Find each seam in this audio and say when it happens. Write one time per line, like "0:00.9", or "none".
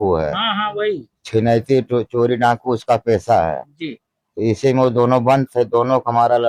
none